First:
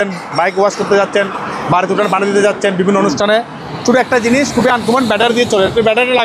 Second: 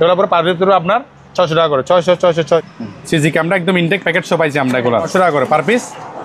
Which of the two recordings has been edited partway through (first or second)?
second